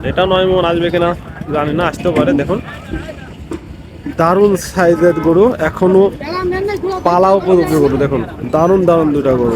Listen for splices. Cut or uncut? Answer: uncut